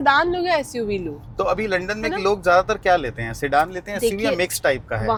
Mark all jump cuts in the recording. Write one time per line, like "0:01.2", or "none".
none